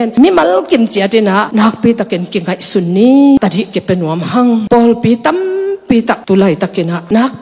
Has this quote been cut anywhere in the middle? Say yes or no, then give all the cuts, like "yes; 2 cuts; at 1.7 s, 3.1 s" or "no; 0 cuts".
yes; 3 cuts; at 1.5 s, 3.4 s, 4.6 s